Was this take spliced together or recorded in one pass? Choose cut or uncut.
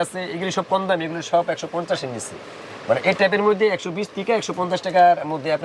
uncut